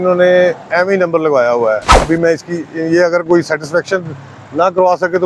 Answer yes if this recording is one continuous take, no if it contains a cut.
yes